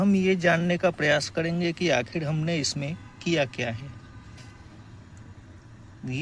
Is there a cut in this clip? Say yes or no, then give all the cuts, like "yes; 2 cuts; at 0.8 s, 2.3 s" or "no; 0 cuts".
no; 0 cuts